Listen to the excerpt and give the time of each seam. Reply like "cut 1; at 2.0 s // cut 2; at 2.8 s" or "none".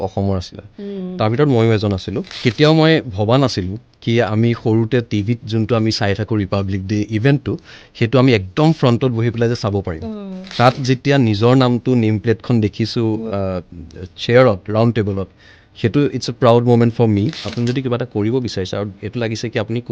cut 1; at 2.3 s // cut 2; at 10.4 s // cut 3; at 17.4 s